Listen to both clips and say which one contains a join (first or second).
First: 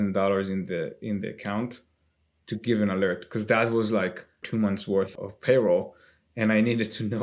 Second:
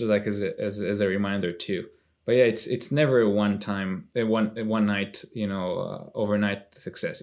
first